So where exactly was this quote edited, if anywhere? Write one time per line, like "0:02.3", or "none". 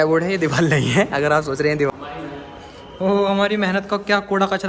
0:01.9